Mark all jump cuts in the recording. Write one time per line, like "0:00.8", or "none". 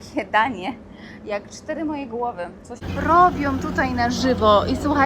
0:02.8